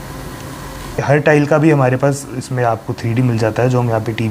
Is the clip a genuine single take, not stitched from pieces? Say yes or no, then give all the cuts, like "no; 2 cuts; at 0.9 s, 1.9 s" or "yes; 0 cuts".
no; 1 cut; at 1.0 s